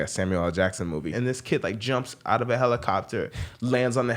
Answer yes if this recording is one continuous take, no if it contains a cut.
no